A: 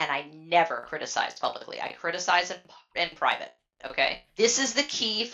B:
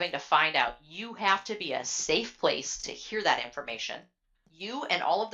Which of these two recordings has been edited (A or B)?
A